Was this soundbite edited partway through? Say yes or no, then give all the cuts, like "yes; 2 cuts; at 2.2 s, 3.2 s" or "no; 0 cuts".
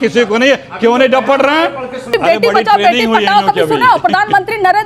yes; 1 cut; at 2.1 s